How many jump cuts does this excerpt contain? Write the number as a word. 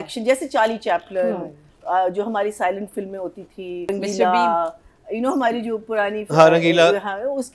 one